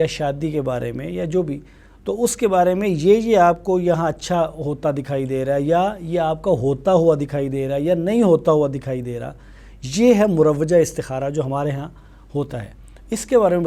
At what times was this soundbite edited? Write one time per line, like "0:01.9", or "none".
none